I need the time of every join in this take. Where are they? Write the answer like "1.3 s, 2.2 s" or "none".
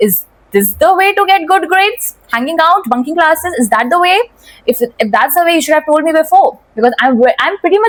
none

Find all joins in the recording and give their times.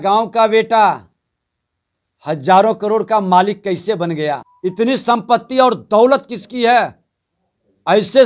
4.5 s

